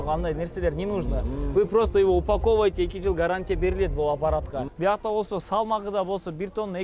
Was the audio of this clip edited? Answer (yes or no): yes